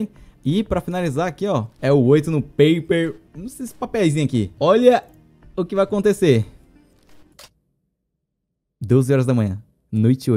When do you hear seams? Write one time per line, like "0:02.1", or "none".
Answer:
0:01.7
0:04.5